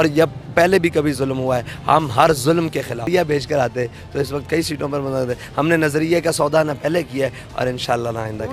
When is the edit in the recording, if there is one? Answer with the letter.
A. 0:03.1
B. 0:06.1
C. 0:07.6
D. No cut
A